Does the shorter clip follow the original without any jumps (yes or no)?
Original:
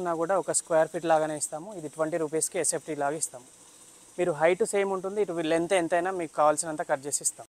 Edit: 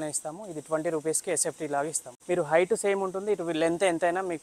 no